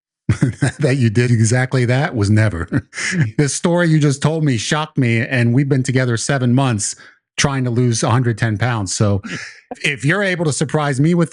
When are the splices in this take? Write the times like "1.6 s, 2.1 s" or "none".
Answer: 1.3 s, 3.3 s, 9.8 s

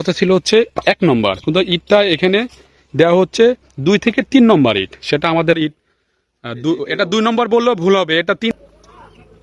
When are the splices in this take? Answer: 5.6 s, 8.5 s

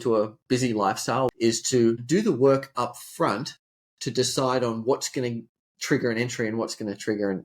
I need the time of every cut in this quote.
1.3 s

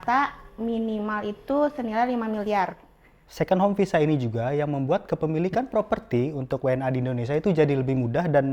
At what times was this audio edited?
3.2 s

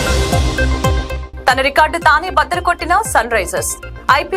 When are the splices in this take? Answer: 1.2 s

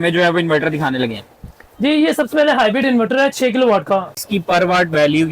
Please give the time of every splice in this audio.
4.2 s

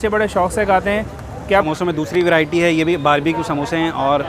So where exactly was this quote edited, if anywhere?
1.5 s

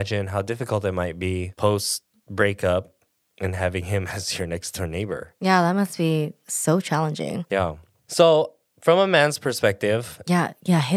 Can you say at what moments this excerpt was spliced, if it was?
1.5 s, 5.3 s, 6.4 s, 7.6 s

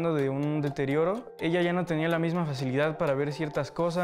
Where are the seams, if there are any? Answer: 1.4 s

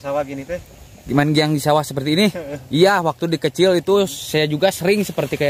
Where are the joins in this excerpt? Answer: none

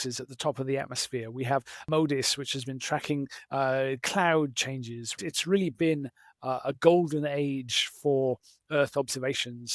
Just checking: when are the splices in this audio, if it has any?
1.8 s, 5.1 s

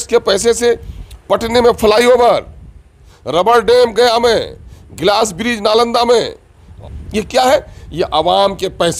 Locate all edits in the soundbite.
none

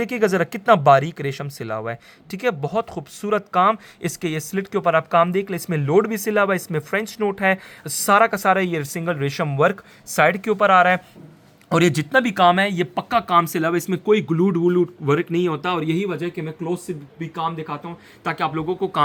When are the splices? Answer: none

